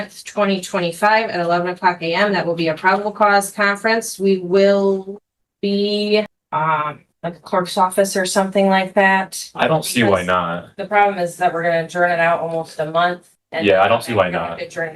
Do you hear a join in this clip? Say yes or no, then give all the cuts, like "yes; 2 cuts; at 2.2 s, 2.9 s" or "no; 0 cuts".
yes; 1 cut; at 6.4 s